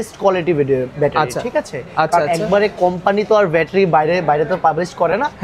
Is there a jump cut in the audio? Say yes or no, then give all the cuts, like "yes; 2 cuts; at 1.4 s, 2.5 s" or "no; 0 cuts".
no; 0 cuts